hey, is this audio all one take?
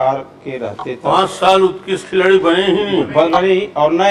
yes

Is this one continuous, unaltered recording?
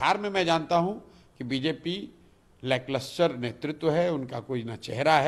yes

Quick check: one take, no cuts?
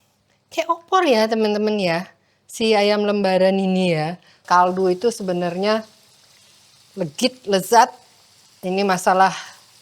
no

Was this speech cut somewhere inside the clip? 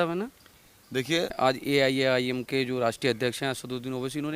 yes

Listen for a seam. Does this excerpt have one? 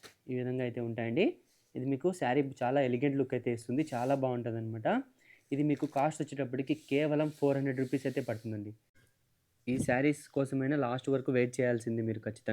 yes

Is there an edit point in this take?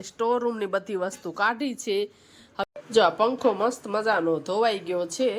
yes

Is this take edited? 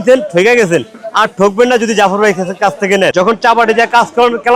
yes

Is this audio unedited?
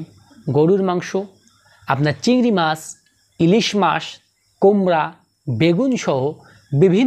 yes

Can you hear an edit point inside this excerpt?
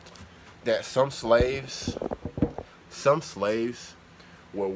no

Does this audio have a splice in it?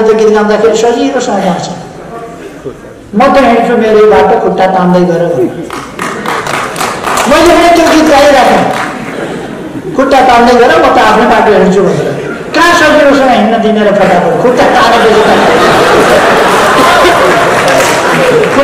no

